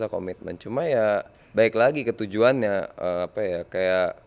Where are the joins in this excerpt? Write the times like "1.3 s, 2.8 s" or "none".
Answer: none